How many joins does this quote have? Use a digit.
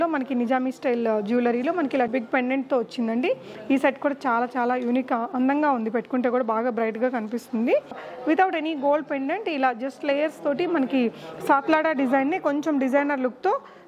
2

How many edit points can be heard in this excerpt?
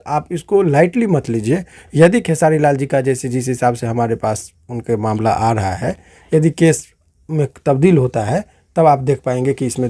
0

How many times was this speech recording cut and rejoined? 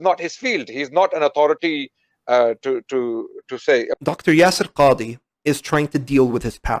1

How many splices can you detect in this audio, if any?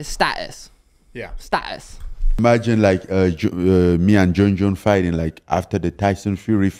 1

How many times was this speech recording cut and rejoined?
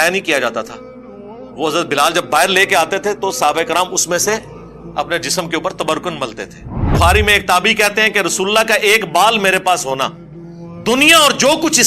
1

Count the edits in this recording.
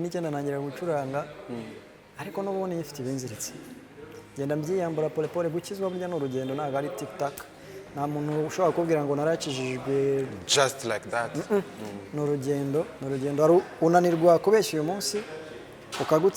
0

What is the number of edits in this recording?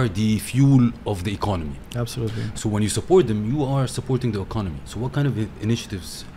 1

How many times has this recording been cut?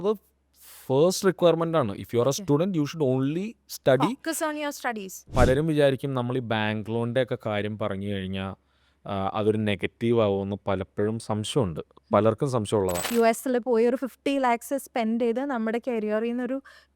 2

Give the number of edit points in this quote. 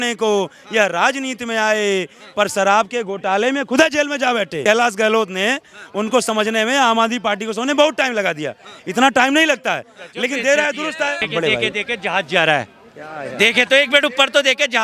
2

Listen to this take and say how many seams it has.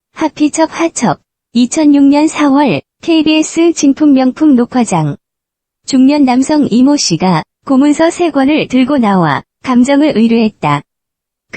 1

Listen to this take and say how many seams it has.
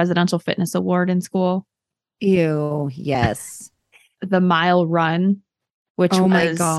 1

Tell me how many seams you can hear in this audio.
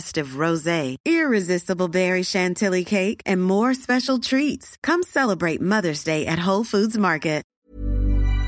1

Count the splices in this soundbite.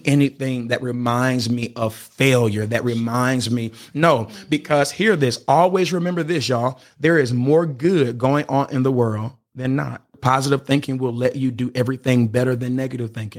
2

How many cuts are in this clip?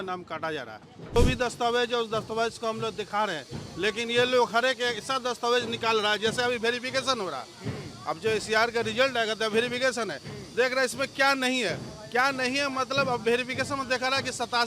1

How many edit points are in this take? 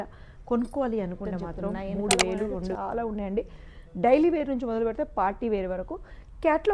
1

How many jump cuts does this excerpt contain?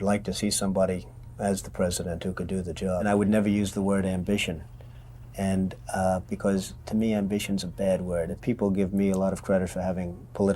2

